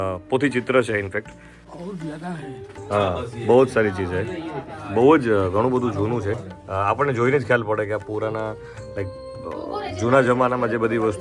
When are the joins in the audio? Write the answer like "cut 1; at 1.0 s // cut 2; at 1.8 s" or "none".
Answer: none

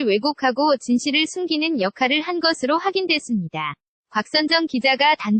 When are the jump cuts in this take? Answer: none

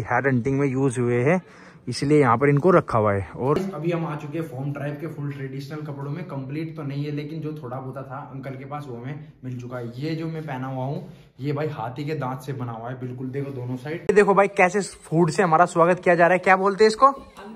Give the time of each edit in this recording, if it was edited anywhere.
cut 1; at 3.6 s // cut 2; at 14.0 s

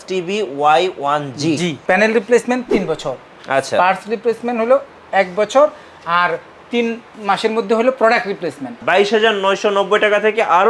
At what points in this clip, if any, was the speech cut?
cut 1; at 1.8 s // cut 2; at 8.8 s

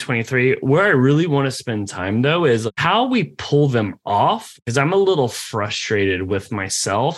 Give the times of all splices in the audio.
cut 1; at 2.7 s // cut 2; at 4.5 s

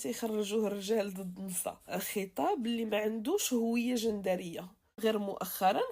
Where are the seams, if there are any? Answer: cut 1; at 1.9 s // cut 2; at 5.0 s

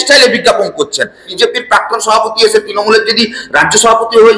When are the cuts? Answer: cut 1; at 1.3 s

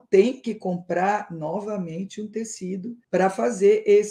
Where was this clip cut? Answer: cut 1; at 3.0 s

